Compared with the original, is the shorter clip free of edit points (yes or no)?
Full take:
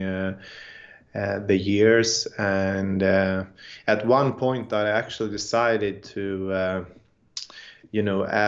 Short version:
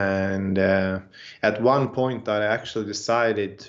yes